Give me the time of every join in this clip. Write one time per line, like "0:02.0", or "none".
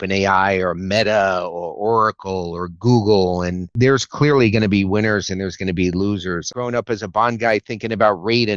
0:03.7
0:06.5